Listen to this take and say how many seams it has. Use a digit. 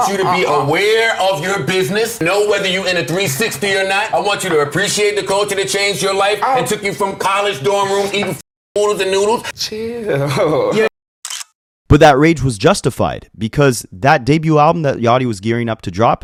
0